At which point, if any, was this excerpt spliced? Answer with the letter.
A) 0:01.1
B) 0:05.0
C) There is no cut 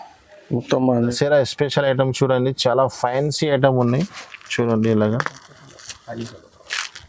A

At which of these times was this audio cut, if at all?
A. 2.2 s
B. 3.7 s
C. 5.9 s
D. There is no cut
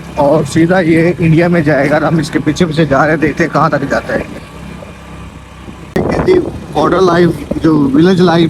D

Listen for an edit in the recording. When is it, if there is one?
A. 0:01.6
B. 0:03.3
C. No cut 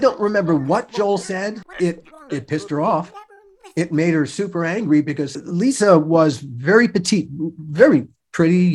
A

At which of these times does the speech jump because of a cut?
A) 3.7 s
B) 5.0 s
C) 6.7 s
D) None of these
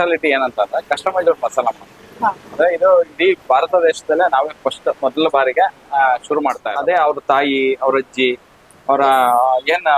C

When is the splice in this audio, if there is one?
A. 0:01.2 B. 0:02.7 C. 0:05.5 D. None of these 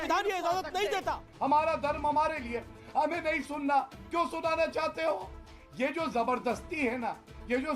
A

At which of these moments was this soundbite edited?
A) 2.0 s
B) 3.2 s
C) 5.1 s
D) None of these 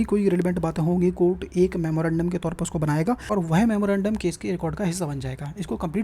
B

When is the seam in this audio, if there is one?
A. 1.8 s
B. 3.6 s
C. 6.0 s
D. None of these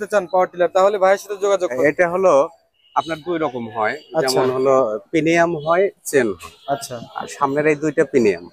A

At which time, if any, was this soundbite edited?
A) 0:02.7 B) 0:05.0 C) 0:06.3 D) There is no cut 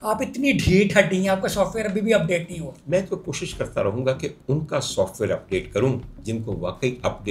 A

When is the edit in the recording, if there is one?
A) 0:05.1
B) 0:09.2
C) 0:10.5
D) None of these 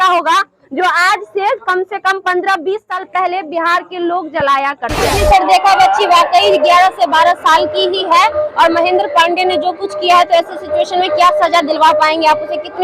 A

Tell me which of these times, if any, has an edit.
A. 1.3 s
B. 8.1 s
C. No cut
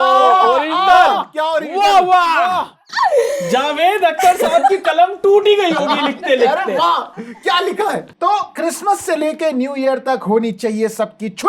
B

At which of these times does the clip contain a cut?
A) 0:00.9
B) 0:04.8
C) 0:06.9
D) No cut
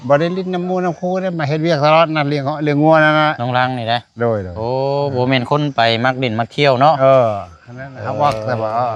D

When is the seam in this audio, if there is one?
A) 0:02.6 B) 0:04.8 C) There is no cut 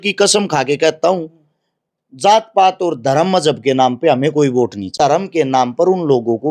B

